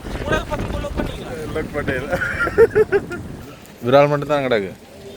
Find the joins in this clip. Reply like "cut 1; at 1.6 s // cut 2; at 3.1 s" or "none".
cut 1; at 3.5 s